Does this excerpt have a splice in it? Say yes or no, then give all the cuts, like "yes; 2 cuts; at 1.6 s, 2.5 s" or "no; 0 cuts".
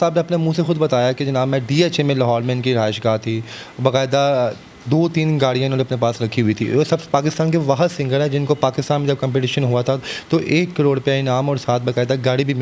no; 0 cuts